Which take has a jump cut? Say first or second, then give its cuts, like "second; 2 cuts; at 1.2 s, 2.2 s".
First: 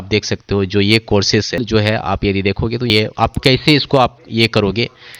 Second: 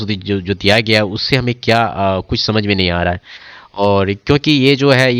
first; 2 cuts; at 1.6 s, 2.9 s